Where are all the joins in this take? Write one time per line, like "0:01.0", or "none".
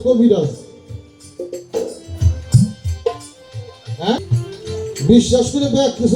0:04.2